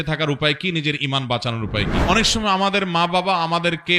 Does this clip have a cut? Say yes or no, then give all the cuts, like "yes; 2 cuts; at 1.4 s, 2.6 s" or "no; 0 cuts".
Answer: yes; 1 cut; at 2.0 s